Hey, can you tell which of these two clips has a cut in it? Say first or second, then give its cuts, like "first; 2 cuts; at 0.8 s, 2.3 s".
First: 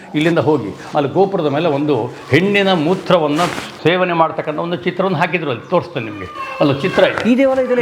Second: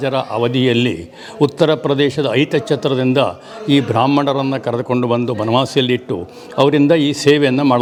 first; 1 cut; at 3.7 s